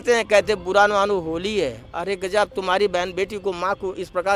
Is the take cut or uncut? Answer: uncut